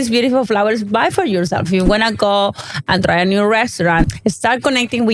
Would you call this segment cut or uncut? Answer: cut